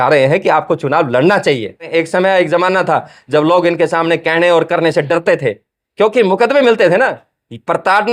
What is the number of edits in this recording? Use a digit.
1